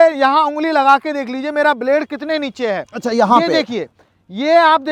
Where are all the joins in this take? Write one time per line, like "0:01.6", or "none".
none